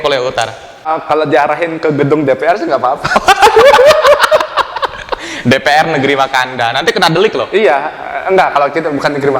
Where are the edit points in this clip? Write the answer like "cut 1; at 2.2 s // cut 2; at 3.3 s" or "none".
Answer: cut 1; at 1.0 s